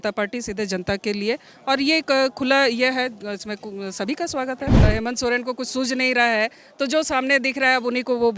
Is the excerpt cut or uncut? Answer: cut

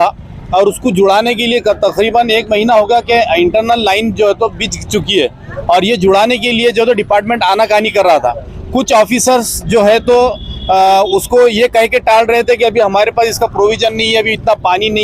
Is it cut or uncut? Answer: uncut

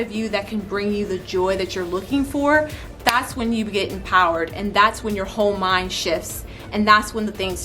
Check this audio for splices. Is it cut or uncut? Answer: uncut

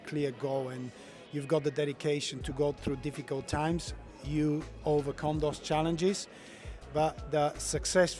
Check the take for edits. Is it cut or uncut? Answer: uncut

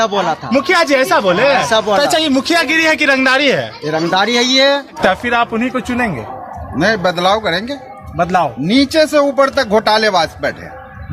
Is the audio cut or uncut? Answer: cut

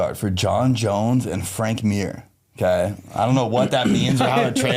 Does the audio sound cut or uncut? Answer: uncut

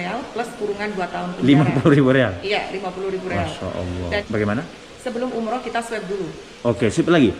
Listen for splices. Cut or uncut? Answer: cut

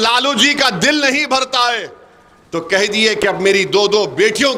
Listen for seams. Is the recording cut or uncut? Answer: uncut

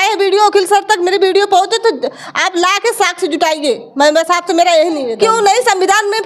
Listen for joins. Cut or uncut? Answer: cut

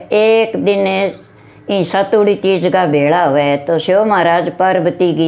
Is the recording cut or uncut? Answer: uncut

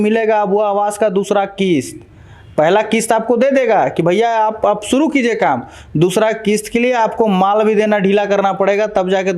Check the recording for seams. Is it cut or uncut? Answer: uncut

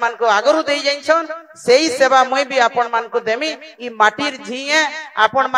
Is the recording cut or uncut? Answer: uncut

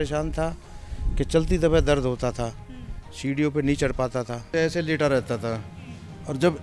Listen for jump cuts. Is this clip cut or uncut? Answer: cut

